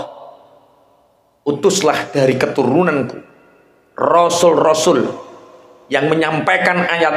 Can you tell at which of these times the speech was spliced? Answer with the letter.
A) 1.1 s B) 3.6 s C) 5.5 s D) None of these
D